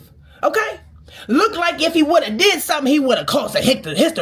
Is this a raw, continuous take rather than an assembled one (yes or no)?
yes